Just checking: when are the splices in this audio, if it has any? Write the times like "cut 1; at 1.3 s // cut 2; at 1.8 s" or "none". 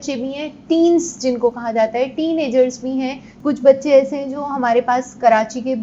cut 1; at 3.2 s